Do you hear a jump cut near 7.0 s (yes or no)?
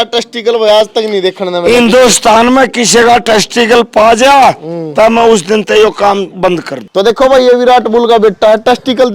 yes